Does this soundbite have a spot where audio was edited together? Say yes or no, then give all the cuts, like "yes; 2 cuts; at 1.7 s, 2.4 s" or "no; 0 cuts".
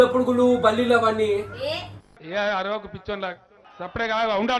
yes; 1 cut; at 1.8 s